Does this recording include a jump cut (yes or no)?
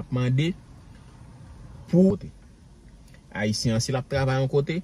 yes